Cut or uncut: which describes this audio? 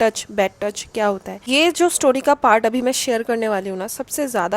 cut